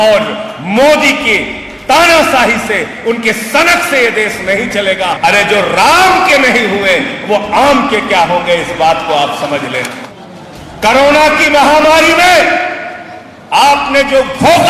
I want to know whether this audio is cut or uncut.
cut